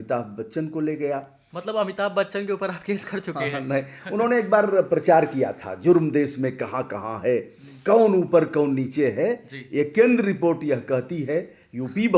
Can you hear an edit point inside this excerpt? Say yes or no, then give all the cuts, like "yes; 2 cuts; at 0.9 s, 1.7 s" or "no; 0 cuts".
no; 0 cuts